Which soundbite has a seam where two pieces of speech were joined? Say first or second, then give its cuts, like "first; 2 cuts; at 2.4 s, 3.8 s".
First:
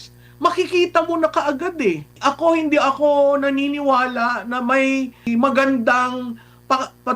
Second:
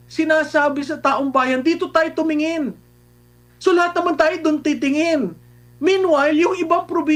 first; 2 cuts; at 2.2 s, 5.2 s